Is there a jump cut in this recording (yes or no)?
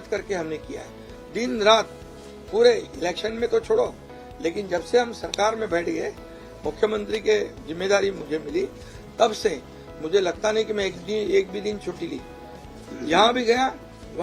no